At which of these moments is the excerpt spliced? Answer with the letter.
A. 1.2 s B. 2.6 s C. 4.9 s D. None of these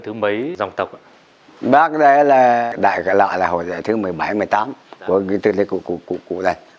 B